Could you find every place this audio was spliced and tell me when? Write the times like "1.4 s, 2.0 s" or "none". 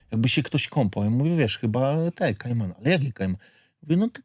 none